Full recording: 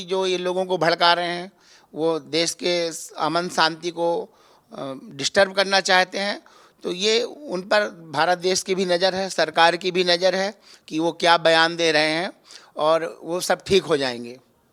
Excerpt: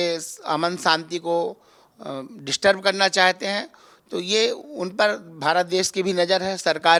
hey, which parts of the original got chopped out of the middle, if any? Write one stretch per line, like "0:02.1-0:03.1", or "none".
none